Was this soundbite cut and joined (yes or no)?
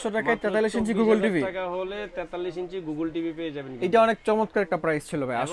no